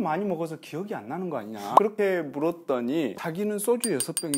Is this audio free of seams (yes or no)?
no